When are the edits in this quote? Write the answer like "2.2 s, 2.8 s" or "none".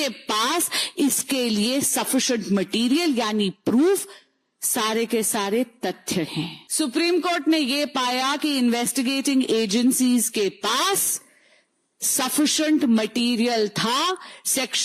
6.6 s